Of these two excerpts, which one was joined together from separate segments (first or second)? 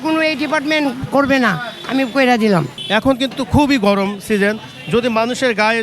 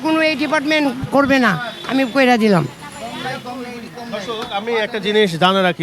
first